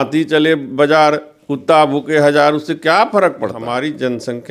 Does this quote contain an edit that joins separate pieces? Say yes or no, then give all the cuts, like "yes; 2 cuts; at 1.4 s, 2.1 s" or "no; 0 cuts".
yes; 1 cut; at 3.6 s